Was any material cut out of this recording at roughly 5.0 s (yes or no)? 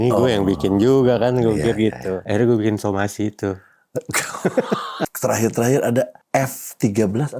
yes